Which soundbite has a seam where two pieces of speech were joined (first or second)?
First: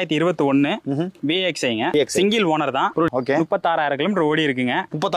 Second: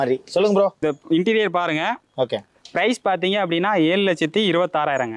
first